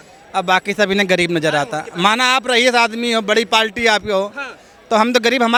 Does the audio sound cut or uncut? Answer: uncut